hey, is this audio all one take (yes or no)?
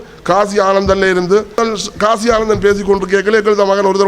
no